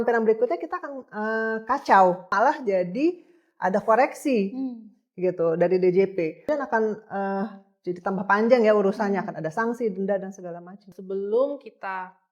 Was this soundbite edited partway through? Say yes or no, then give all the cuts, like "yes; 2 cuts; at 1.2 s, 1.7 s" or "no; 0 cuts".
yes; 3 cuts; at 2.3 s, 6.5 s, 10.9 s